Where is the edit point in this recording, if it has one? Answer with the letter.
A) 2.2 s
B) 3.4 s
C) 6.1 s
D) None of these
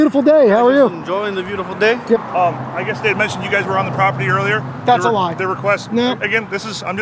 A